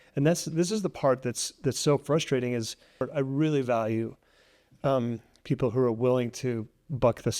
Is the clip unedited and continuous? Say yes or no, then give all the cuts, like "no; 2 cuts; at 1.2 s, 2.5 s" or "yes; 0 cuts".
no; 1 cut; at 3.1 s